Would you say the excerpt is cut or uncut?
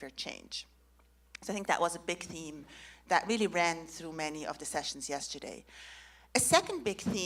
uncut